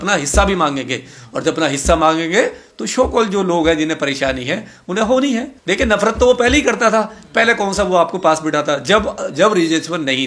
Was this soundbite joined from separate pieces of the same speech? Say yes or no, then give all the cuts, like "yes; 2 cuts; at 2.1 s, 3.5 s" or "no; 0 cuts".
yes; 1 cut; at 5.5 s